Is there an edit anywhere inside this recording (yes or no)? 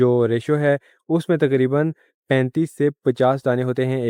no